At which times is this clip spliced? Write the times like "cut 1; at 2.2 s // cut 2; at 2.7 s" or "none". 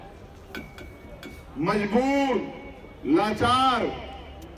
none